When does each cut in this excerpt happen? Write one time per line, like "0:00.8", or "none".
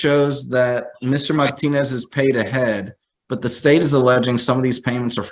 none